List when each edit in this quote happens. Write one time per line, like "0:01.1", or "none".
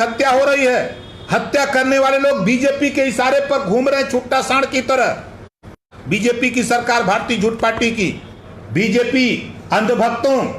0:05.9
0:08.5